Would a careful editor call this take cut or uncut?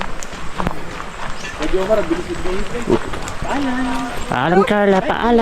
cut